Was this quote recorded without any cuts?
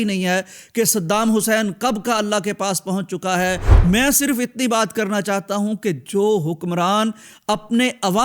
no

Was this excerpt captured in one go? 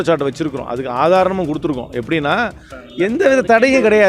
no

